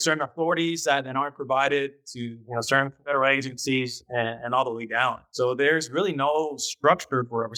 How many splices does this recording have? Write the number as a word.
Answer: zero